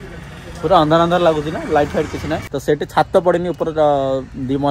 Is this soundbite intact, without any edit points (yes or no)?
no